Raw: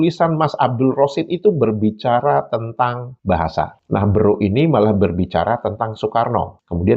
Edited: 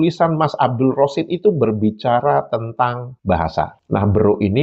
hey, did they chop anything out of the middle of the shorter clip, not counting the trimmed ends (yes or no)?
no